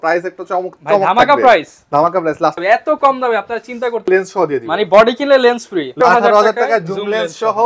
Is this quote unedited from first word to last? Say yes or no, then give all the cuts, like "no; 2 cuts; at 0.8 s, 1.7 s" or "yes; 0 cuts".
no; 3 cuts; at 2.6 s, 4.1 s, 6.0 s